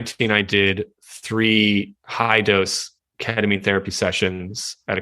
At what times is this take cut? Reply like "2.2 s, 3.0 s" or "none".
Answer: none